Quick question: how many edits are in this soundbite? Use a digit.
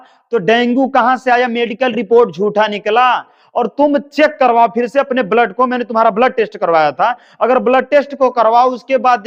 0